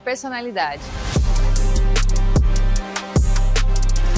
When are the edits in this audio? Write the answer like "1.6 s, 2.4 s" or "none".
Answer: 0.9 s